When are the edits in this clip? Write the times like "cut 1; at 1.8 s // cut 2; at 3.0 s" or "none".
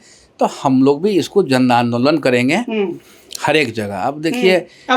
none